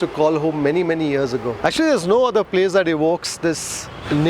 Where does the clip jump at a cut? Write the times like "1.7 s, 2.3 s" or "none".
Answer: 1.5 s